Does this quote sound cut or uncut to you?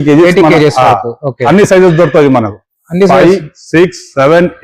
uncut